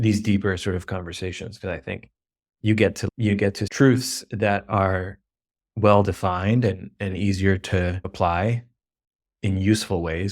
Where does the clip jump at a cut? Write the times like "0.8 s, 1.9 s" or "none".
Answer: 3.6 s, 8.1 s